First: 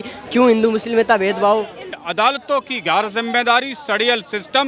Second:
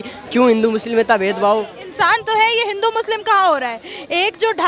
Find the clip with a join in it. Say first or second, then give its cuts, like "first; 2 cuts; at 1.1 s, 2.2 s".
first; 1 cut; at 1.9 s